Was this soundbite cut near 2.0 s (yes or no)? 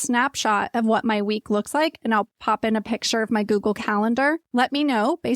no